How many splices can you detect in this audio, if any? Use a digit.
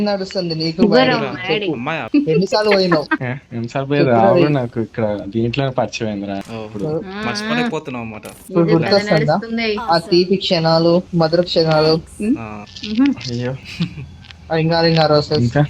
2